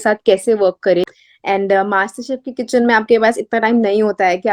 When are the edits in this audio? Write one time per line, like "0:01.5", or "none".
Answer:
0:01.2